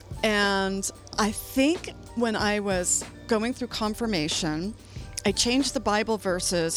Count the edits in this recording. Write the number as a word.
one